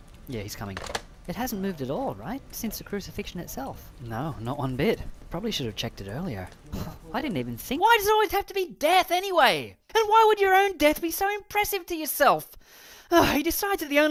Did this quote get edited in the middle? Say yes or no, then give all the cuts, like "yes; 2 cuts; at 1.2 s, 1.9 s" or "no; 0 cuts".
no; 0 cuts